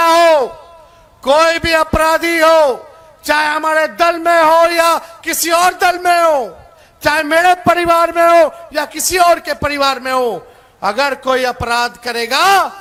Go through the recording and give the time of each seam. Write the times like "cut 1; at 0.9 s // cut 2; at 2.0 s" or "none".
none